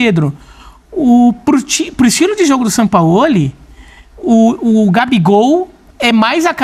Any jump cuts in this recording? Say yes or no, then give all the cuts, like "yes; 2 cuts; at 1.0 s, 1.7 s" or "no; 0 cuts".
no; 0 cuts